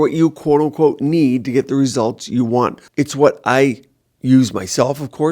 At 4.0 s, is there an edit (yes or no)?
no